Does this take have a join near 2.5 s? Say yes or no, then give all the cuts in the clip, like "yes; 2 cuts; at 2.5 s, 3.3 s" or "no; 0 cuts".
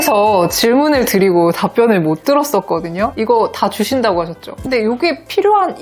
no; 1 cut; at 4.5 s